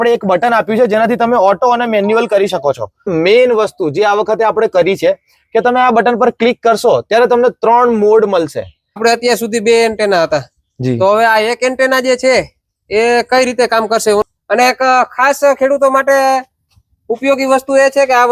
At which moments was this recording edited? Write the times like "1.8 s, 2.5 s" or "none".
3.1 s, 8.8 s, 14.2 s

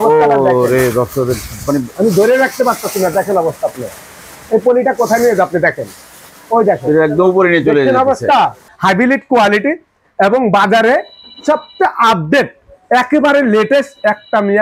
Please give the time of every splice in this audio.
8.7 s

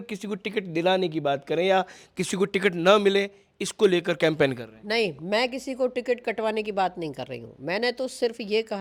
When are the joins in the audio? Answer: none

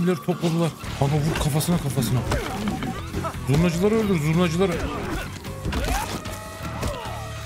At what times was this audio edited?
0.8 s, 3.0 s

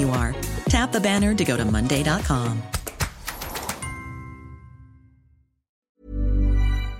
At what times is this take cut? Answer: 5.8 s

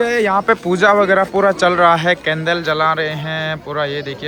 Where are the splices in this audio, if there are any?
none

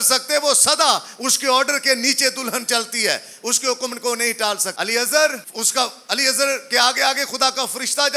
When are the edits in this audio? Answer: 4.7 s, 5.5 s

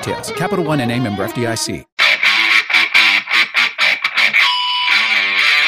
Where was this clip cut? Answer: 1.9 s

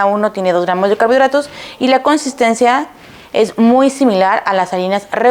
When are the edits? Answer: none

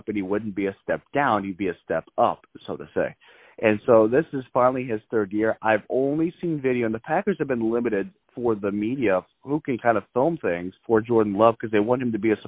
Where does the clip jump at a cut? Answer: 10.7 s

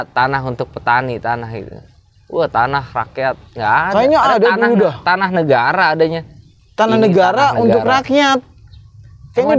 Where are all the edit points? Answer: none

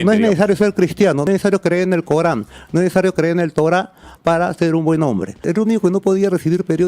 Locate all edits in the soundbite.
1.3 s, 5.4 s

